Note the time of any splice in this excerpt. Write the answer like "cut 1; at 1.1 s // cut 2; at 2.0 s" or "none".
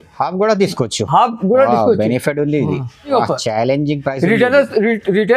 cut 1; at 3.1 s